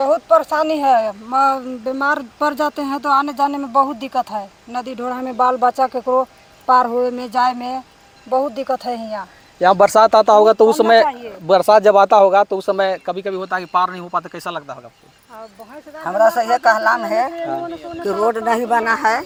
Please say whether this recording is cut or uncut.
uncut